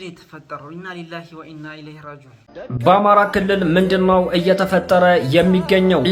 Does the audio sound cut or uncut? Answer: uncut